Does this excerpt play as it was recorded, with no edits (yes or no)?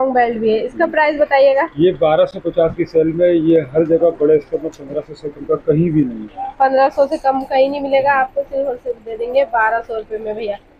yes